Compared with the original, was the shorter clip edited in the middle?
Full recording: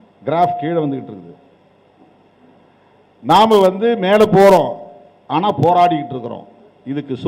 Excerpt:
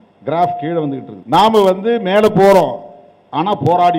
yes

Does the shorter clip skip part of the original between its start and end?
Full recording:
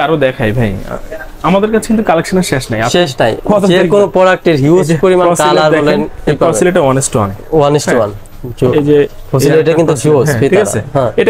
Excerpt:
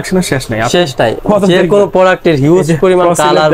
no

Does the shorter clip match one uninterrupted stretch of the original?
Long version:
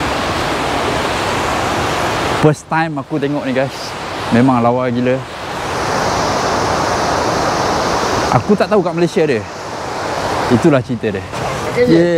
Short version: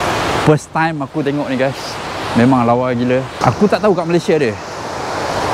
no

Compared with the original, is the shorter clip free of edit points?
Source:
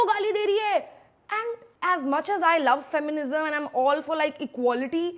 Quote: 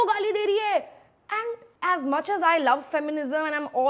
yes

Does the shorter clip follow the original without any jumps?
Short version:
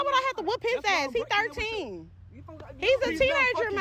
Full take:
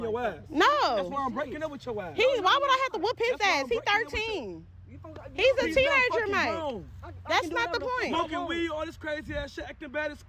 yes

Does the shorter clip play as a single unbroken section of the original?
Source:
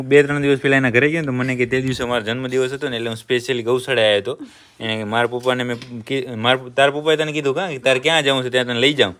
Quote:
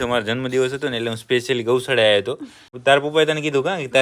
no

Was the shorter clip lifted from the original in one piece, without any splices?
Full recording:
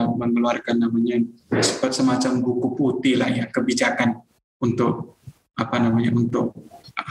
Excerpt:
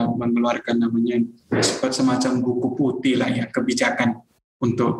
yes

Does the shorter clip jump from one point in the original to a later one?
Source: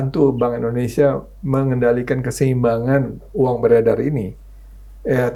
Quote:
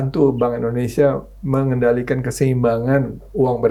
no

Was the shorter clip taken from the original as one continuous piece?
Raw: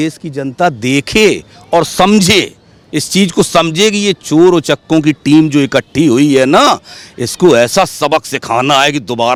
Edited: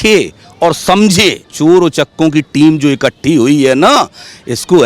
no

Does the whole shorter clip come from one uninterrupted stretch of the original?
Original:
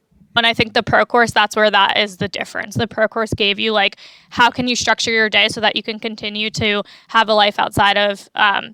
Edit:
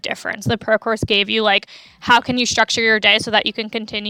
yes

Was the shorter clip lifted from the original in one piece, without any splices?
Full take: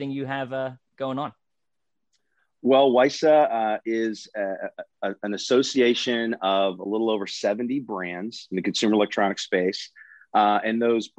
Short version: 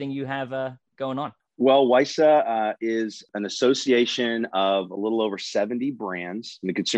no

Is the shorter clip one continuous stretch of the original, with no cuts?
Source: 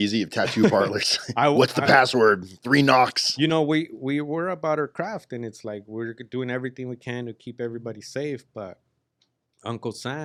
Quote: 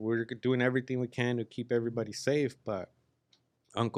yes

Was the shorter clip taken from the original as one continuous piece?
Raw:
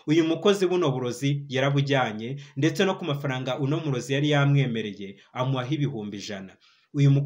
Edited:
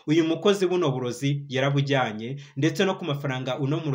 yes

